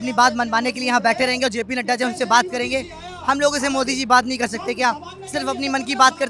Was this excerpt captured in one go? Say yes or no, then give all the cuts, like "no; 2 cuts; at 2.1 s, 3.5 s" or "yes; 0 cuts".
yes; 0 cuts